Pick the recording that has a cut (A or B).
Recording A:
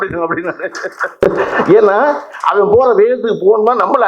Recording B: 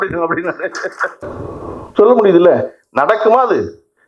B